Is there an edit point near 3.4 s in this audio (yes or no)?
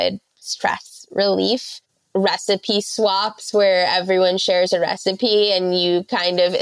no